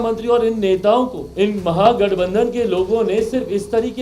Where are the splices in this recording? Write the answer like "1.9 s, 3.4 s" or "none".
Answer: 1.2 s

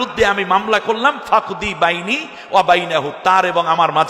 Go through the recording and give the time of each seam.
none

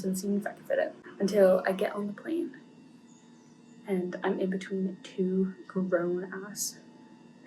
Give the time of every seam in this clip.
1.0 s

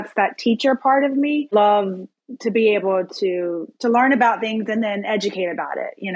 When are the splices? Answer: 1.5 s

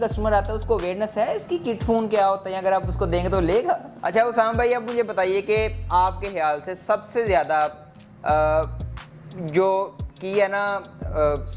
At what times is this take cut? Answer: 3.9 s

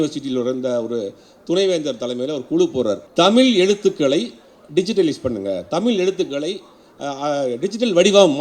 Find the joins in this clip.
3.0 s

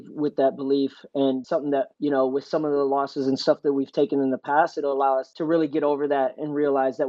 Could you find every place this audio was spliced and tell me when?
1.5 s, 5.3 s

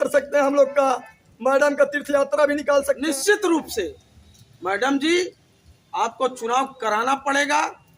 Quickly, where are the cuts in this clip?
3.0 s

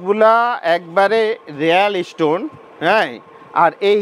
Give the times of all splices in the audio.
none

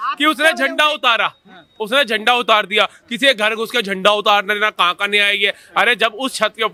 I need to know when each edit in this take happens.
none

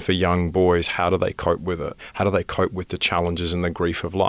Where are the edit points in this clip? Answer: 2.0 s

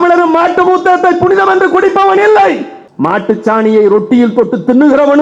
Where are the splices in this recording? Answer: none

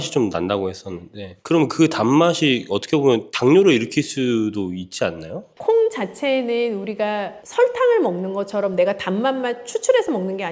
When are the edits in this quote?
5.5 s

